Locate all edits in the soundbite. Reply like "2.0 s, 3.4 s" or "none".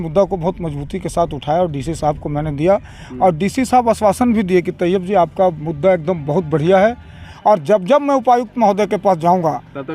7.3 s

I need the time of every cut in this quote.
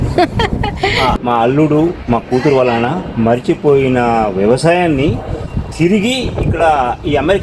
1.2 s

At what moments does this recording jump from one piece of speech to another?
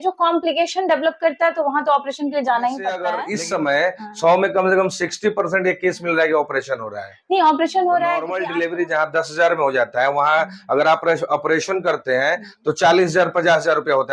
3.2 s, 8.4 s

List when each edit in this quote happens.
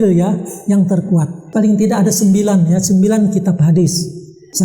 1.4 s

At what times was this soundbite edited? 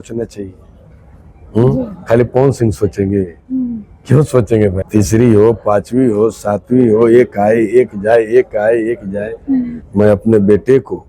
4.8 s, 9.8 s

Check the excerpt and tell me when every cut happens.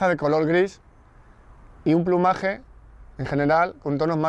2.2 s

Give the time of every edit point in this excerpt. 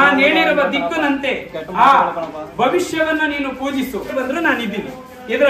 4.2 s

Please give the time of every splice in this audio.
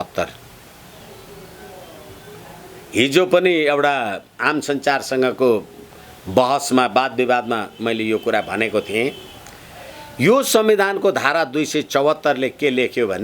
none

